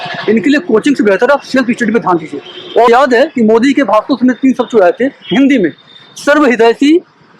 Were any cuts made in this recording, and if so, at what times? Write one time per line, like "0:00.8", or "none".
0:02.9